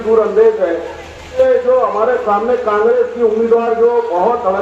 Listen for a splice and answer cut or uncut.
cut